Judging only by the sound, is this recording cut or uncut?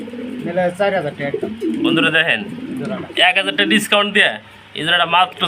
uncut